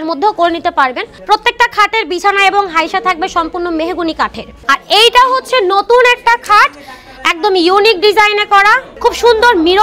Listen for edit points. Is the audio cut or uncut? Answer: cut